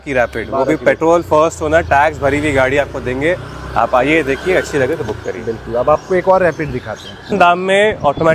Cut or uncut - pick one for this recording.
uncut